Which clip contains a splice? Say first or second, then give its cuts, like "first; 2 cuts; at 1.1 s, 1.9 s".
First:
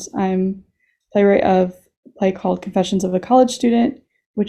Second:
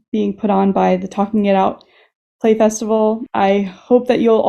second; 1 cut; at 3.3 s